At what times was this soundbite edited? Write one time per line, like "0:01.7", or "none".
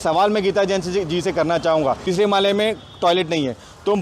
0:02.0